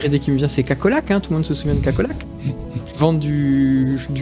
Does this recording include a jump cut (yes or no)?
yes